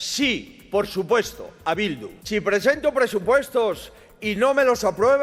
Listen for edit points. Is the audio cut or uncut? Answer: cut